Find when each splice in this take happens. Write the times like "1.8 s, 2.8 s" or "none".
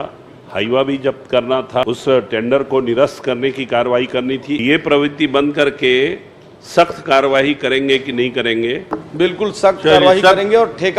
1.8 s, 4.6 s, 8.9 s